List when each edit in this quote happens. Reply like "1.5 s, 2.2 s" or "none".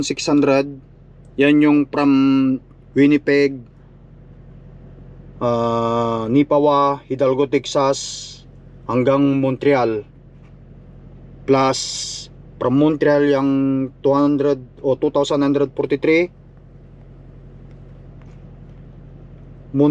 none